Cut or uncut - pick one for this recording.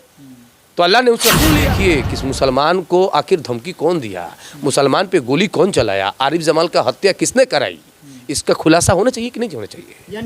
cut